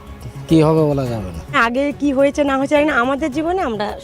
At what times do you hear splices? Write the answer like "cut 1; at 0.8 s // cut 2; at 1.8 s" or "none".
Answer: cut 1; at 1.6 s